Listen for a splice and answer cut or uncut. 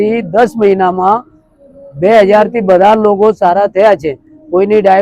uncut